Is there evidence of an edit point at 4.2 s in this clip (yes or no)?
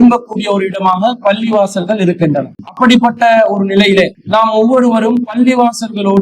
yes